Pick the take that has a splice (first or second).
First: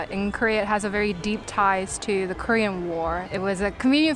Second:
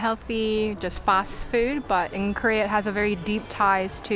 first